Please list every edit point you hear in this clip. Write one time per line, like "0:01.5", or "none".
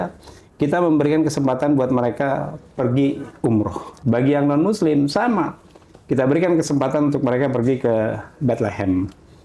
0:03.9